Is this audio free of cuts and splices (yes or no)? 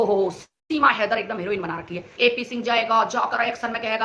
no